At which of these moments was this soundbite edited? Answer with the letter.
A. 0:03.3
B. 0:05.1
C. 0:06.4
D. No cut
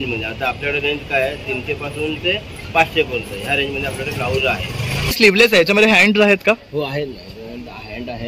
B